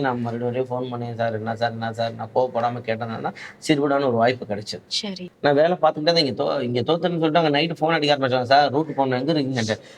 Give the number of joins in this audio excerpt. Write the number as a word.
one